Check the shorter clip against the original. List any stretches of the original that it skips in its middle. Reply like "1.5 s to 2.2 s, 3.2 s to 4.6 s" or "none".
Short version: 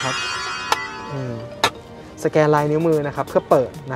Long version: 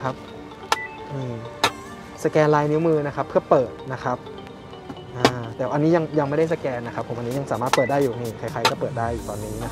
none